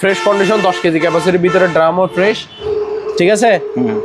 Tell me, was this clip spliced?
yes; 1 cut; at 2.6 s

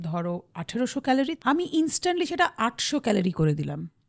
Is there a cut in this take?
yes; 1 cut; at 1.3 s

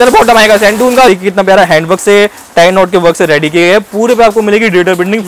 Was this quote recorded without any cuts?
no; 1 cut; at 1.1 s

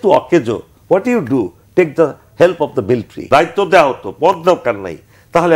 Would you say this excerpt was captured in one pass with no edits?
no; 1 cut; at 3.2 s

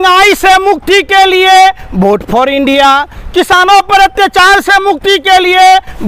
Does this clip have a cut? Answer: no; 0 cuts

